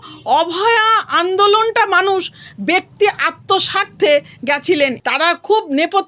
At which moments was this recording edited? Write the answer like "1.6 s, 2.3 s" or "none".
5.0 s